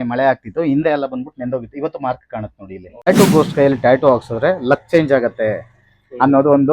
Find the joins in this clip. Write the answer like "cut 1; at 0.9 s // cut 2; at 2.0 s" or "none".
cut 1; at 3.1 s